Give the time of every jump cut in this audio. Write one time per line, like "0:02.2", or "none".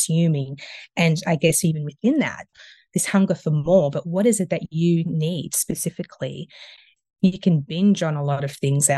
0:02.4
0:06.9